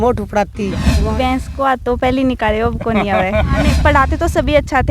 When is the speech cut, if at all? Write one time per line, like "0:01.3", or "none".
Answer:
0:00.9
0:03.7